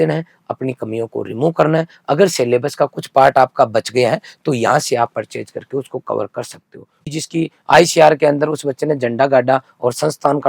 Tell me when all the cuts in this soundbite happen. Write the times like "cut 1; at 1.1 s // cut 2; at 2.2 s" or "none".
cut 1; at 7.1 s